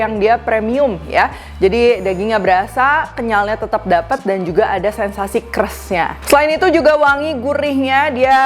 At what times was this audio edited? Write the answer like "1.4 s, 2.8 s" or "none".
none